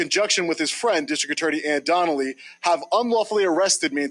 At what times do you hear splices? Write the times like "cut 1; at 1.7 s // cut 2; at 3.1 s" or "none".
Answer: none